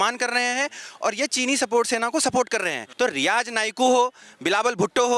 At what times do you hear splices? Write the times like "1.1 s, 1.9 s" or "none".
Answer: 2.8 s